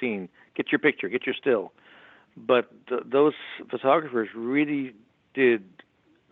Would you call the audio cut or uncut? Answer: uncut